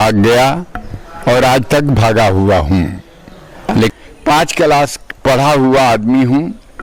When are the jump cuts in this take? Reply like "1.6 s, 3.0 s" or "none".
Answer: 3.9 s